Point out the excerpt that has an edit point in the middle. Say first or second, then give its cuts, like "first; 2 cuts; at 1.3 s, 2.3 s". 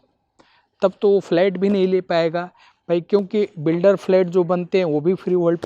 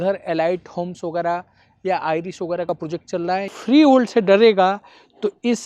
second; 1 cut; at 3.6 s